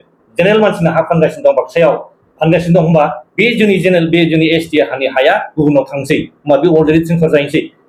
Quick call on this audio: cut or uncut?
uncut